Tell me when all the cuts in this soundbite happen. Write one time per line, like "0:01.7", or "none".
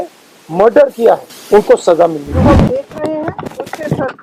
0:01.3
0:02.5